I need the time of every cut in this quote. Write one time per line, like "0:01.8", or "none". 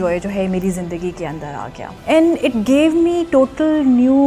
0:01.9